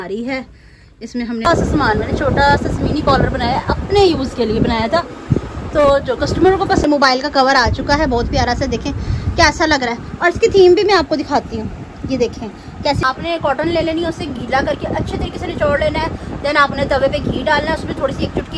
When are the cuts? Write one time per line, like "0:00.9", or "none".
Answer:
0:01.5
0:06.9
0:10.0
0:13.0